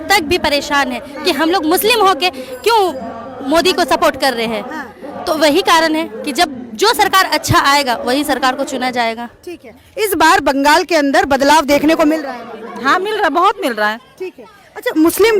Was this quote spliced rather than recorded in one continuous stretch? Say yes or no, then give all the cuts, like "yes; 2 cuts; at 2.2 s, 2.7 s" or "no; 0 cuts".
no; 0 cuts